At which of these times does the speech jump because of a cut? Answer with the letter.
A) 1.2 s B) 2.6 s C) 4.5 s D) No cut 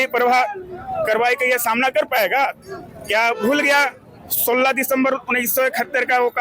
D